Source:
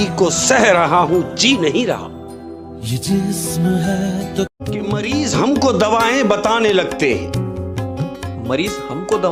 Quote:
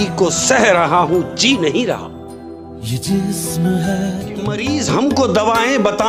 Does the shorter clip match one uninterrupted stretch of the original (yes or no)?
no